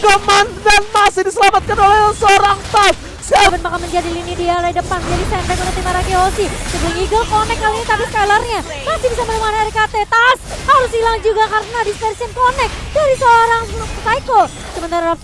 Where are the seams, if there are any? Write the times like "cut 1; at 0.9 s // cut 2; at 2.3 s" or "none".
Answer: cut 1; at 3.5 s